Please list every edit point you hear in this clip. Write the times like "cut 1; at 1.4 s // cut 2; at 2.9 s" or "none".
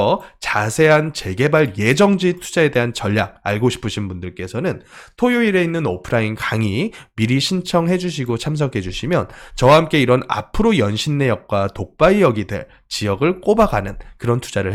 none